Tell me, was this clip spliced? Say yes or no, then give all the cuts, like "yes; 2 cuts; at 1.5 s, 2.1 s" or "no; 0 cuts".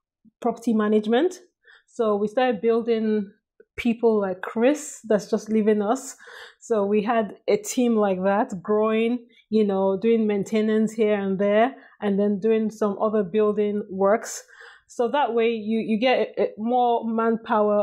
no; 0 cuts